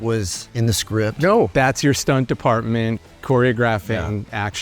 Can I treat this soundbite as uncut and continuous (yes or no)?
no